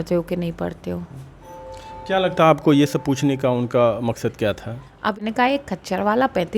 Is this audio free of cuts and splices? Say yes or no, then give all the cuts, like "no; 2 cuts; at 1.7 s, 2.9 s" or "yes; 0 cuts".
no; 1 cut; at 5.2 s